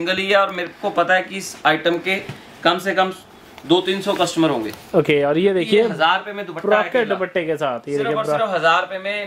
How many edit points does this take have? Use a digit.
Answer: 0